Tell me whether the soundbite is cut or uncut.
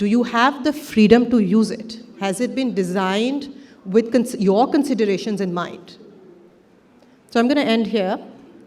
uncut